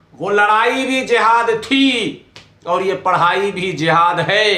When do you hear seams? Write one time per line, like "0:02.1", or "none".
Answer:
none